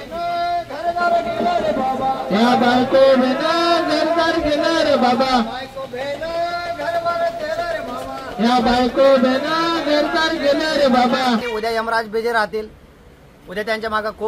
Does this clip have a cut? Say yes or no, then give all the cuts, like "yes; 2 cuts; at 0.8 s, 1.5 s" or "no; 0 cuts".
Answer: yes; 1 cut; at 11.4 s